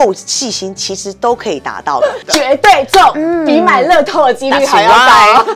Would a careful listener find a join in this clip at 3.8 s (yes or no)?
no